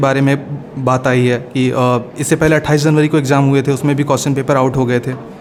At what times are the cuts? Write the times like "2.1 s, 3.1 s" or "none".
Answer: none